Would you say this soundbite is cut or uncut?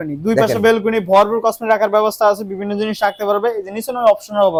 uncut